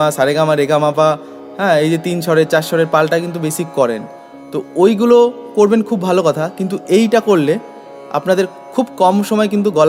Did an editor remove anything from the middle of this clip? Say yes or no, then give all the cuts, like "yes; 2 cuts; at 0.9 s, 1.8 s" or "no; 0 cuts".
no; 0 cuts